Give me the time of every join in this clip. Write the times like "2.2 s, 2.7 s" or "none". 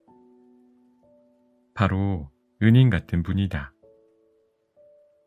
4.2 s